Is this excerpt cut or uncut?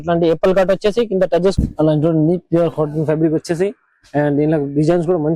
cut